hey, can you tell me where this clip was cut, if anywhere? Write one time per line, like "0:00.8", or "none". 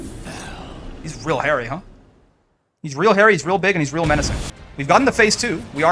0:04.4